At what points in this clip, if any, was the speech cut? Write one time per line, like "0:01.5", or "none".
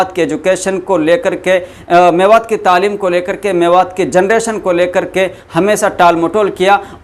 none